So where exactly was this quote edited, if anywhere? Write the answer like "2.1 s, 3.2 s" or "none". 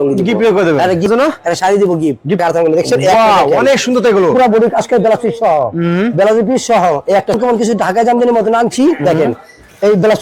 1.1 s, 2.4 s, 7.4 s